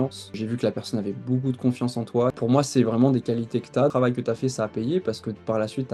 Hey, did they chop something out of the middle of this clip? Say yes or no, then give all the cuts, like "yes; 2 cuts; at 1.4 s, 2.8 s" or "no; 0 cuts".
yes; 2 cuts; at 2.4 s, 3.9 s